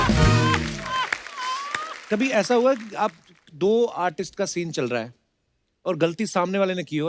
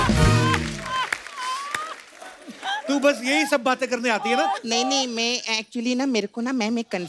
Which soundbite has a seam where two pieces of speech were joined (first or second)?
first